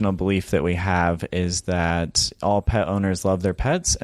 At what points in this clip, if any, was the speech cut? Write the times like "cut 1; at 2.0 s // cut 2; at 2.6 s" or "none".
none